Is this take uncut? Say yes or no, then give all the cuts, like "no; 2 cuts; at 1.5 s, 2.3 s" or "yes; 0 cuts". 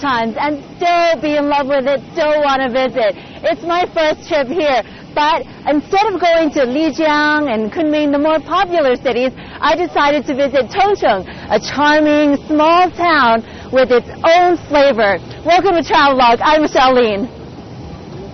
yes; 0 cuts